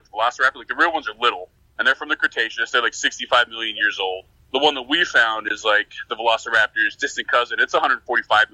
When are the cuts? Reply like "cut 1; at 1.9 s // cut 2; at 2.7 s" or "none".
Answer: none